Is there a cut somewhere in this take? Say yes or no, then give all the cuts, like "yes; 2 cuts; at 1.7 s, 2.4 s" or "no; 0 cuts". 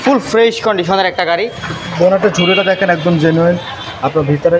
yes; 1 cut; at 1.8 s